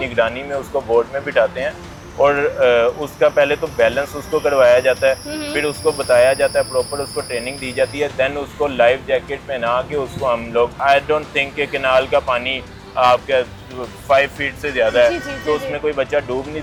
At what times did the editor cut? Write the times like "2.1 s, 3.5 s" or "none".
none